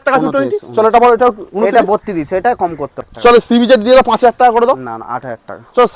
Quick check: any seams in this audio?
yes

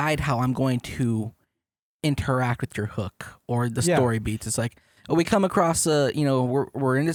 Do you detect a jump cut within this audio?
no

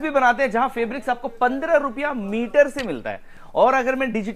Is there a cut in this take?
no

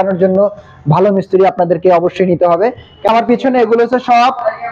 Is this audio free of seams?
no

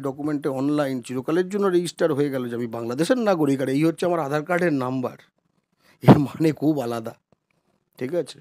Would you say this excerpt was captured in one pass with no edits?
yes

